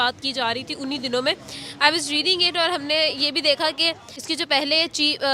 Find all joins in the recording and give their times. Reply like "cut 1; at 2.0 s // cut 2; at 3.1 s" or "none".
cut 1; at 4.1 s